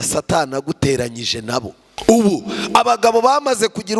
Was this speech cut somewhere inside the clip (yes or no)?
yes